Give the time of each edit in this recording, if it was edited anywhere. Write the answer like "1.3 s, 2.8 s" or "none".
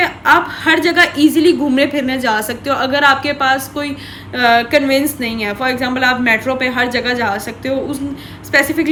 none